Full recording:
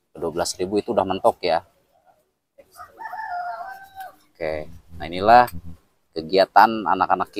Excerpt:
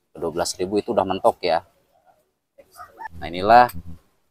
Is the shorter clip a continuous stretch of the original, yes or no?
no